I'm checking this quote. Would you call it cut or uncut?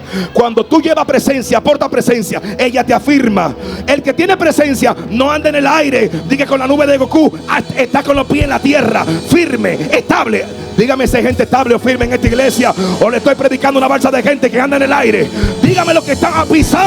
uncut